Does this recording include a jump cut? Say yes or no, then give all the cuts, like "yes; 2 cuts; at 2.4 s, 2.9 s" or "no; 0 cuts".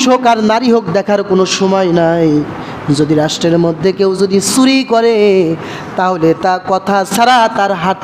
no; 0 cuts